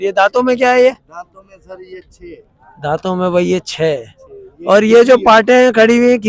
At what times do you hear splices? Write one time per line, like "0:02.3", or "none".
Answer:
none